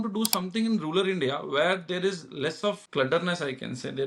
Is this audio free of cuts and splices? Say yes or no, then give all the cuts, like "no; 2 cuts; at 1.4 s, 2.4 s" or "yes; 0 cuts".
no; 1 cut; at 2.8 s